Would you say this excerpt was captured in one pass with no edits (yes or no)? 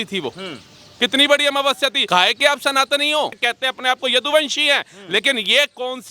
no